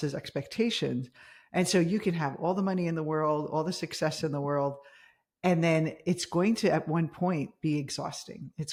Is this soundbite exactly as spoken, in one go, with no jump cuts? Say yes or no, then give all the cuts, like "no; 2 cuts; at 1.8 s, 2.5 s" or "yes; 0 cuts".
yes; 0 cuts